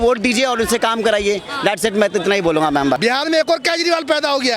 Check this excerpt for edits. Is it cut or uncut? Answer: cut